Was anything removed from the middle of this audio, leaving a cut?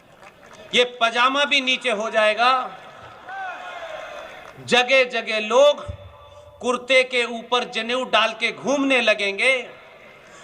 yes; 1 cut; at 3.1 s

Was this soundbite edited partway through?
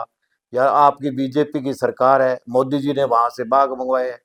no; 0 cuts

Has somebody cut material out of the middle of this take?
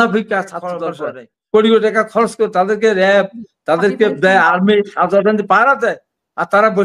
yes; 1 cut; at 0.9 s

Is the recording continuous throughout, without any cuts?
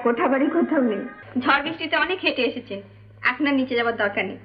no; 1 cut; at 1.2 s

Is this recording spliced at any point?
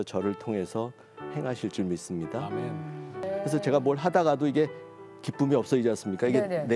yes; 1 cut; at 3.2 s

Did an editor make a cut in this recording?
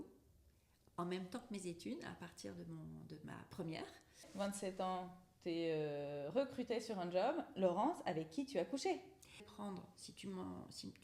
yes; 2 cuts; at 4.3 s, 9.5 s

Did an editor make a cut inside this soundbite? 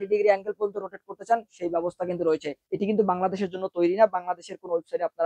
yes; 1 cut; at 2.6 s

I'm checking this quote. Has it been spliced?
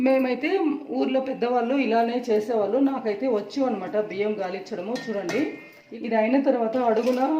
yes; 1 cut; at 5.8 s

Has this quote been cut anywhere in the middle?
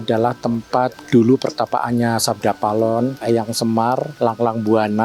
yes; 3 cuts; at 1.0 s, 3.2 s, 4.1 s

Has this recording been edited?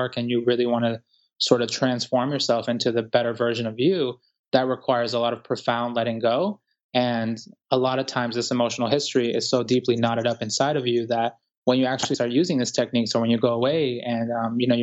no; 0 cuts

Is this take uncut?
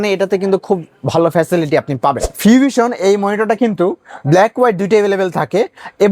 no; 1 cut; at 2.3 s

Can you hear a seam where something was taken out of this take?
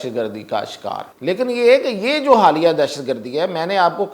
yes; 1 cut; at 1.1 s

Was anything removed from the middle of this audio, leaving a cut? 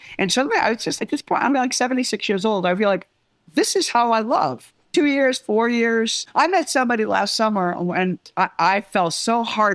yes; 3 cuts; at 1.0 s, 4.7 s, 6.2 s

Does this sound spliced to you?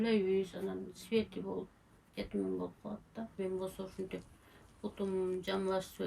yes; 1 cut; at 3.3 s

